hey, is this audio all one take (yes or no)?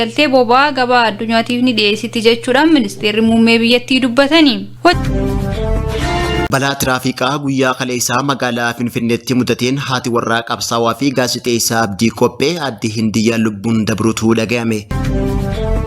no